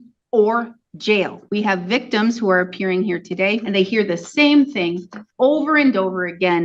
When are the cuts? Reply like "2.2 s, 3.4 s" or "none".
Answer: 1.4 s, 3.6 s